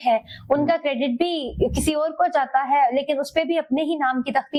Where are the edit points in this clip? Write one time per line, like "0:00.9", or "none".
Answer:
none

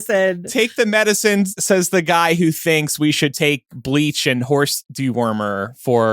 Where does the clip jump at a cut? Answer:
0:01.4

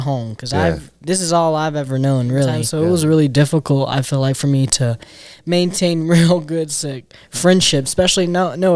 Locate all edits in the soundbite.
0:02.6

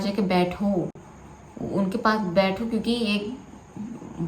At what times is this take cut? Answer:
none

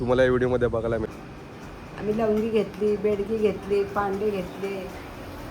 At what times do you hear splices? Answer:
0:01.1

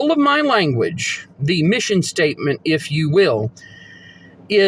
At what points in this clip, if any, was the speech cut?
none

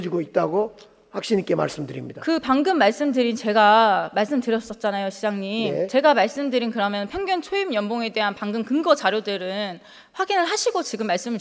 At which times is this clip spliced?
none

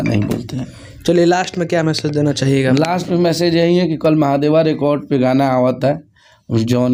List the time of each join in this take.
none

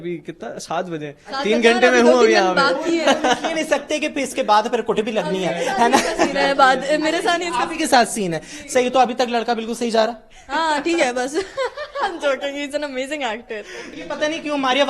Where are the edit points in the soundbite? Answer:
0:13.8

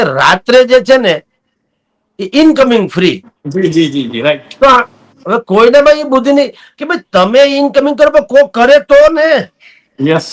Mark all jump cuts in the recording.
none

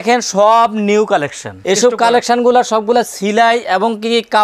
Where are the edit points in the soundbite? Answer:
0:01.5

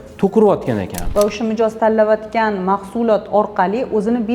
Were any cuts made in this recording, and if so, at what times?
0:01.0

